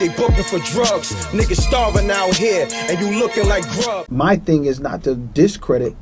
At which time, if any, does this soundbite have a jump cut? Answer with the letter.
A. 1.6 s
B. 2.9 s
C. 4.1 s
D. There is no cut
C